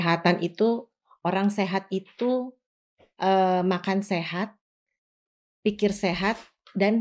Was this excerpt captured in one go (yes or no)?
yes